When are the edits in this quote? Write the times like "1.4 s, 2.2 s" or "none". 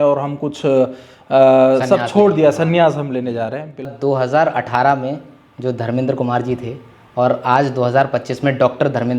3.9 s